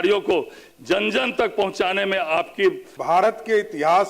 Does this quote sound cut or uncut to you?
cut